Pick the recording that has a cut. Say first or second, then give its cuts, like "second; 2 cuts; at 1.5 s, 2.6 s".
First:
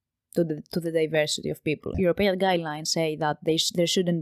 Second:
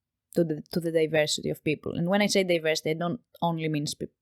first; 1 cut; at 1.9 s